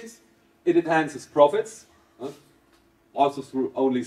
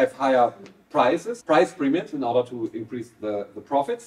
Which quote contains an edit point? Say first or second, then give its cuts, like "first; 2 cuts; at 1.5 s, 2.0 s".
second; 1 cut; at 1.3 s